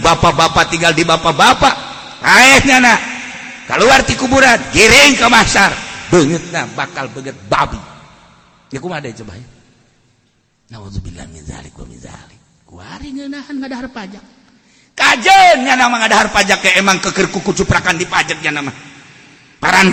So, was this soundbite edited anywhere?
no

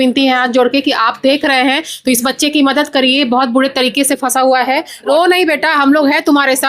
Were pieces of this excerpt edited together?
yes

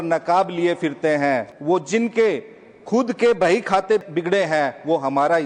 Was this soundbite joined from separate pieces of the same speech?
yes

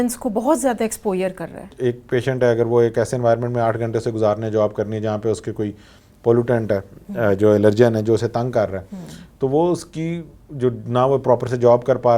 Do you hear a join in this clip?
no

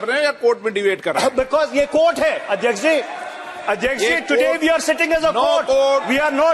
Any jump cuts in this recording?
no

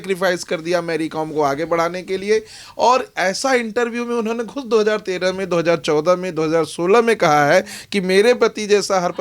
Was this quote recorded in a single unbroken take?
yes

